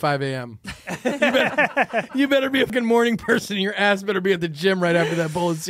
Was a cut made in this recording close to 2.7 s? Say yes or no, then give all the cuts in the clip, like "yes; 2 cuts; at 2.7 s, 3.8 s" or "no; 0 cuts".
yes; 1 cut; at 2.7 s